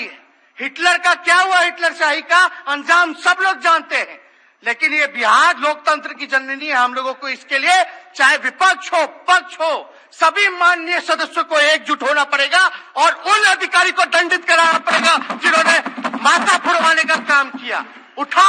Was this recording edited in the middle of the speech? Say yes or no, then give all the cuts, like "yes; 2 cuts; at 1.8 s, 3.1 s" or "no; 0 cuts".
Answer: no; 0 cuts